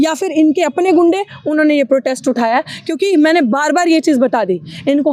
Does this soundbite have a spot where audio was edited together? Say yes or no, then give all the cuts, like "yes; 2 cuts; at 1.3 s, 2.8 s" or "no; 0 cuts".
no; 0 cuts